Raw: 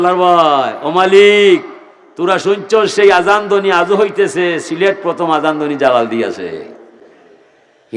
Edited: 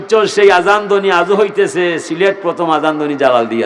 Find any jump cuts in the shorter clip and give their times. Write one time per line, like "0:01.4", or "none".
none